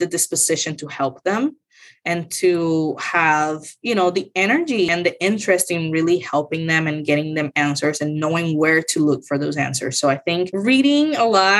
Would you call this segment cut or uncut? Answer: cut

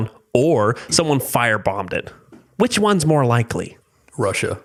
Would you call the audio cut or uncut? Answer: uncut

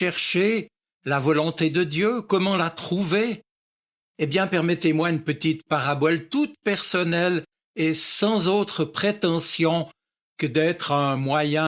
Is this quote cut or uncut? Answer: uncut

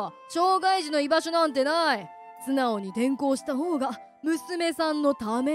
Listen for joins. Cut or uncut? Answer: uncut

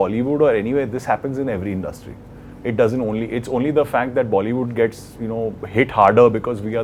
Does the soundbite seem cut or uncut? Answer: uncut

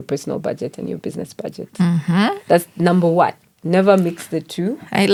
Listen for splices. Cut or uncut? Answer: uncut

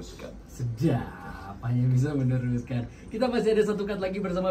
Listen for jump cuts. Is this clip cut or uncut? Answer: uncut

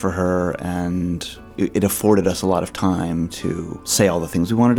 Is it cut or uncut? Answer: cut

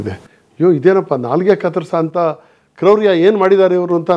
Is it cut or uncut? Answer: uncut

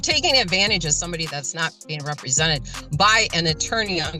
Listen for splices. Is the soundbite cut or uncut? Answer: uncut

